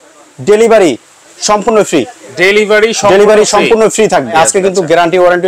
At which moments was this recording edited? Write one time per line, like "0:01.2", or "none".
0:04.3